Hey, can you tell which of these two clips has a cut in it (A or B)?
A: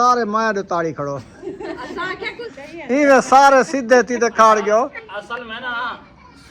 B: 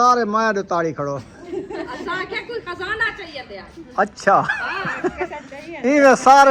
A